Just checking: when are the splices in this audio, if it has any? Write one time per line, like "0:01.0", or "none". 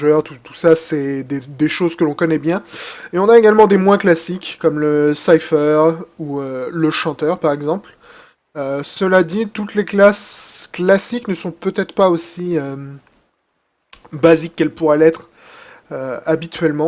none